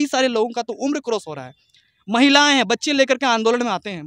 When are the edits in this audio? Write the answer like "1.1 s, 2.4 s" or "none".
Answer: none